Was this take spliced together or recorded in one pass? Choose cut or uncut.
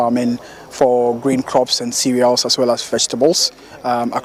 uncut